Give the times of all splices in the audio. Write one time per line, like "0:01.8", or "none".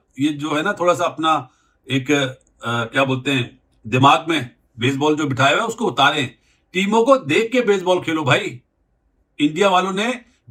none